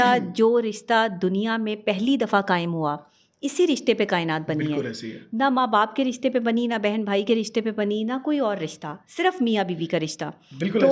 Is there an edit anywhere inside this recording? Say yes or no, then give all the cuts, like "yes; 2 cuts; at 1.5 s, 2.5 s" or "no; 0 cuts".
no; 0 cuts